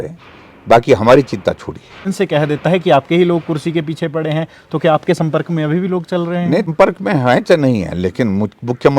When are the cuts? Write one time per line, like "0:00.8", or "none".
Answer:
0:02.1
0:06.7